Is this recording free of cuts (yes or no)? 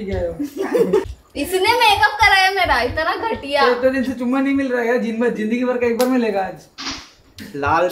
yes